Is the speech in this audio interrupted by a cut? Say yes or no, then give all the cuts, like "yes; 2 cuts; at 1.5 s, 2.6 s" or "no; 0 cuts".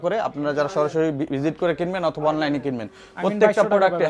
no; 0 cuts